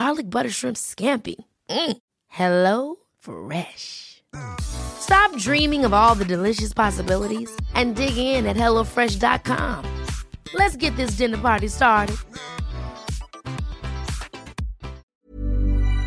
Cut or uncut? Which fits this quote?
cut